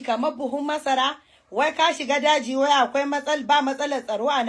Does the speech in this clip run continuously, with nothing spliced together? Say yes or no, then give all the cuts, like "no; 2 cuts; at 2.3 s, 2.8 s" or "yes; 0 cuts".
yes; 0 cuts